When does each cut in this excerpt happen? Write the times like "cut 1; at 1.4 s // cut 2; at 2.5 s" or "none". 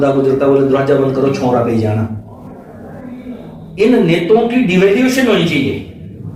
none